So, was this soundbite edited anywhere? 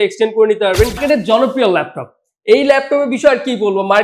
yes; 1 cut; at 1.0 s

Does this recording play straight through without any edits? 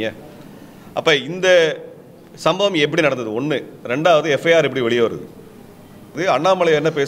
no; 1 cut; at 6.2 s

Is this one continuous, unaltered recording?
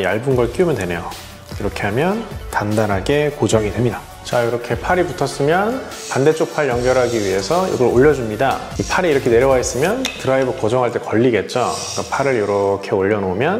no; 1 cut; at 3.7 s

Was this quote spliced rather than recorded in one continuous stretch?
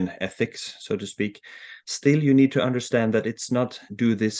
no; 0 cuts

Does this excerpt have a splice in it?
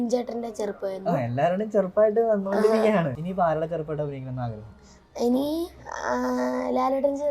yes; 1 cut; at 3.2 s

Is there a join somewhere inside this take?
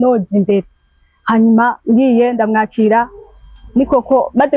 no; 0 cuts

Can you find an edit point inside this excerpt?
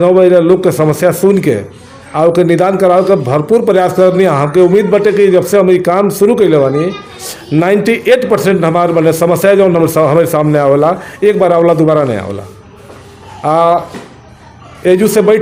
no; 0 cuts

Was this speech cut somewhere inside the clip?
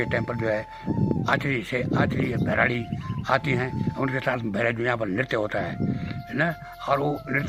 no; 0 cuts

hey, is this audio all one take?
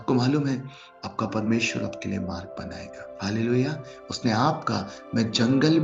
no; 1 cut; at 3.0 s

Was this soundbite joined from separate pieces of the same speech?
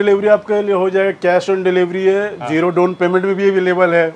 no; 0 cuts

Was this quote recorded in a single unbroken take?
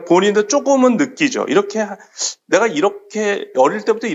yes; 0 cuts

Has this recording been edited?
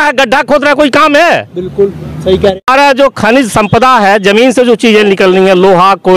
yes; 1 cut; at 2.6 s

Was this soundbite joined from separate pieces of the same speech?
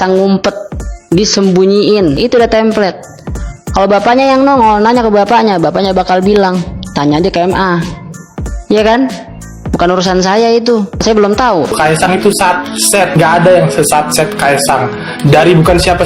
yes; 1 cut; at 11.8 s

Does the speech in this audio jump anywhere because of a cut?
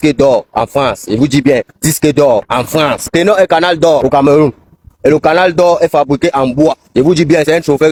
no; 0 cuts

